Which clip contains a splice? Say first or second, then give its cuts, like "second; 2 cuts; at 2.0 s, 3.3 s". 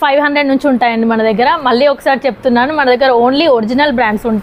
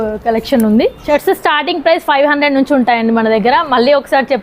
second; 1 cut; at 1.0 s